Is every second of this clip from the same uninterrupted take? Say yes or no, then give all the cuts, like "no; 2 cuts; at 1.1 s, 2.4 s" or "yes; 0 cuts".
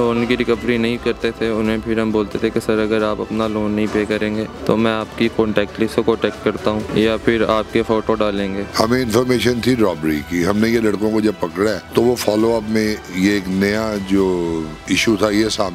no; 4 cuts; at 4.5 s, 6.9 s, 8.6 s, 11.8 s